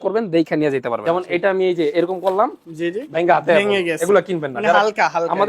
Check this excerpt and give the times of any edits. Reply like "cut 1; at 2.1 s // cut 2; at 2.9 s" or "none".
cut 1; at 1.0 s